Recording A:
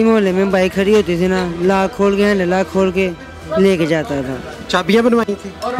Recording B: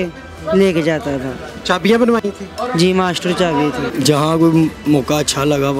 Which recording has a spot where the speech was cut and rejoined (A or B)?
B